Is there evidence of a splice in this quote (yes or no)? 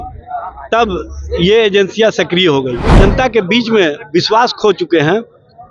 yes